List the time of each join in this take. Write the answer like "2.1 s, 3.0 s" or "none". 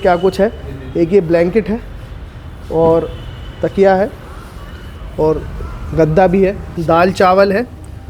6.7 s